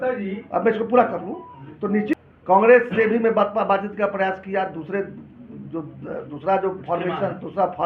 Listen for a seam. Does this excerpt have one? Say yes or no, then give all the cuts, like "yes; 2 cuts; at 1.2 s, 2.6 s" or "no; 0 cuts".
yes; 1 cut; at 2.2 s